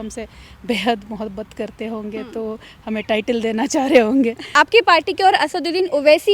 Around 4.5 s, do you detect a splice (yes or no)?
yes